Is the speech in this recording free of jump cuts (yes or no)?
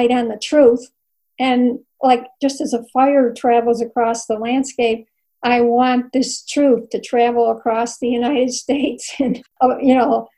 no